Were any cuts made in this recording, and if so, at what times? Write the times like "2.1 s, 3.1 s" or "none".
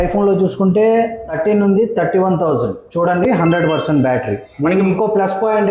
1.2 s, 2.8 s, 4.5 s